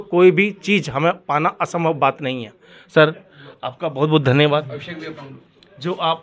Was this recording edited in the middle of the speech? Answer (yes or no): no